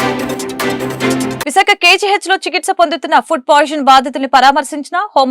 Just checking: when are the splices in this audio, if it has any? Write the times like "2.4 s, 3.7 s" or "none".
1.4 s